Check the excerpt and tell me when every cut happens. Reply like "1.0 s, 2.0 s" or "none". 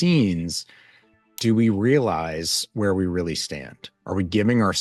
none